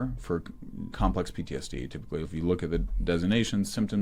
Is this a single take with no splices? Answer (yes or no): no